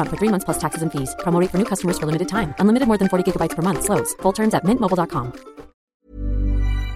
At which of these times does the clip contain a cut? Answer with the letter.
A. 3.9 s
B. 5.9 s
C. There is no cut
B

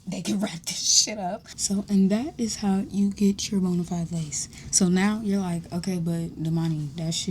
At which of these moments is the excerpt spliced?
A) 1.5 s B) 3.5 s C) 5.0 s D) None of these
A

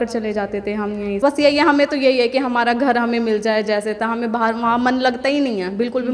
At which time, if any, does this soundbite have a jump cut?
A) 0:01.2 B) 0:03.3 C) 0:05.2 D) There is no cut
A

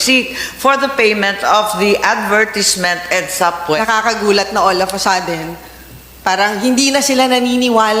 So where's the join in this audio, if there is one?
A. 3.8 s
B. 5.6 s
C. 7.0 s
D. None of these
A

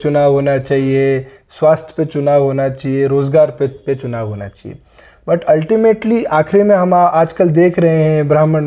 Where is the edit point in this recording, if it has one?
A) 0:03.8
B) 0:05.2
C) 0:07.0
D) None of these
D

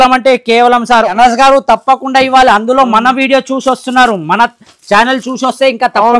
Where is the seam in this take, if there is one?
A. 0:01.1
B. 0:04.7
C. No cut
A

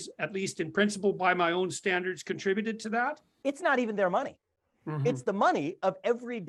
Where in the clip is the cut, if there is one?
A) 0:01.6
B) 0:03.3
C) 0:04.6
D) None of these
B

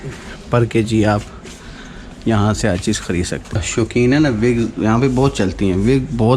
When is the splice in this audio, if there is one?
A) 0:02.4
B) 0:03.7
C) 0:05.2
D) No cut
B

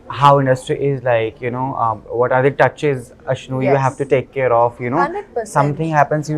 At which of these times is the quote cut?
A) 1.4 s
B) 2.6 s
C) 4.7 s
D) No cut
D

